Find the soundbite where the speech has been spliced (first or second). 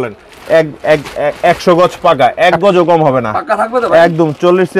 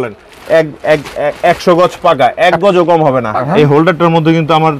second